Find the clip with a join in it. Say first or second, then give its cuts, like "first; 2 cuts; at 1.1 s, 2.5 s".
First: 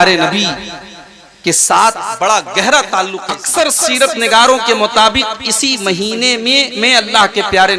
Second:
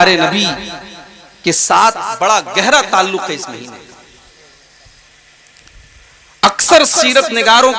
first; 1 cut; at 3.4 s